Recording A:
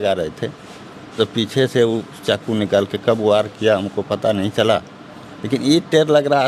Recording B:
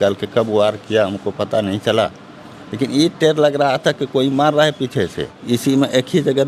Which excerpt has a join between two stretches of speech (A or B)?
B